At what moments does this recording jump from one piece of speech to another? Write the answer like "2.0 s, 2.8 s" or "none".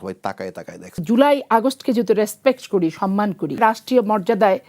1.0 s, 3.6 s